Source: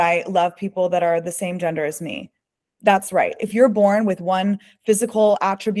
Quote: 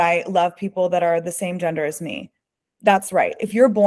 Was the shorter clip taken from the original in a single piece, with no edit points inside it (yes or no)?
yes